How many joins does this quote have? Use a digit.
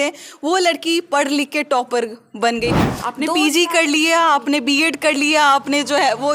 1